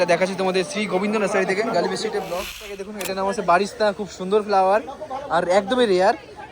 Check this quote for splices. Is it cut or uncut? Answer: cut